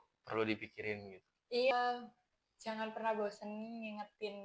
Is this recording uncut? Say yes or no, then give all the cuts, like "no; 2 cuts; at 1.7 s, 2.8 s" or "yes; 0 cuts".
no; 1 cut; at 1.7 s